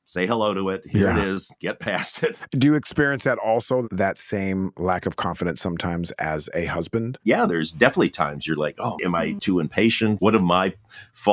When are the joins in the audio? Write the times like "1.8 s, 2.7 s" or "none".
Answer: 7.2 s, 9.0 s, 10.2 s